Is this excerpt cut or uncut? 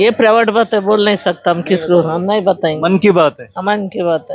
uncut